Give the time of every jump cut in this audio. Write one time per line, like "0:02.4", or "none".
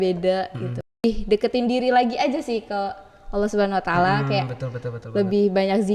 0:01.0